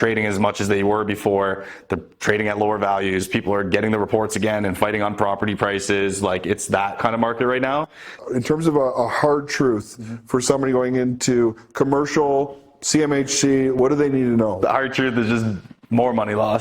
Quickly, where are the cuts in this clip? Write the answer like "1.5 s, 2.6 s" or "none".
8.3 s, 13.8 s, 14.6 s